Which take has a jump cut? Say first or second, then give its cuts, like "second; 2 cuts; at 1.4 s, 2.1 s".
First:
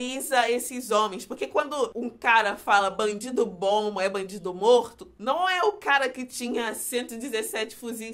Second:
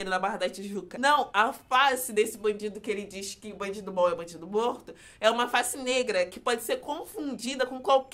first; 1 cut; at 5.0 s